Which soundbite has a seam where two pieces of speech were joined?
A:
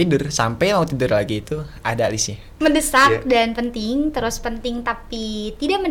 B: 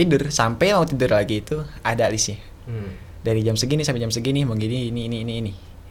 A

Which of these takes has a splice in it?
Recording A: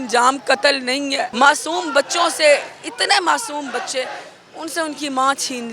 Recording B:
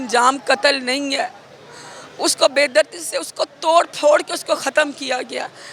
A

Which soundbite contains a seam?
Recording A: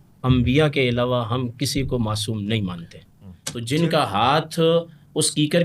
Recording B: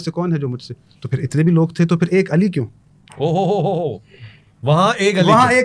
A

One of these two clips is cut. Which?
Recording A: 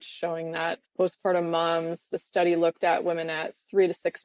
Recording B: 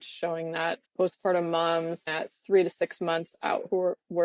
B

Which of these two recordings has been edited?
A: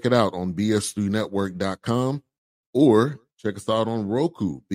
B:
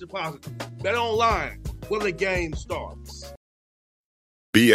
B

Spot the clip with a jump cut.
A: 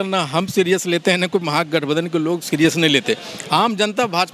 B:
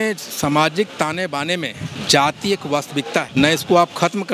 B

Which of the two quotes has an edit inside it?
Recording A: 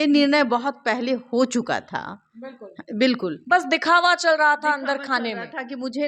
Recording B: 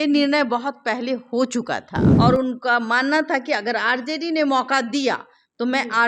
B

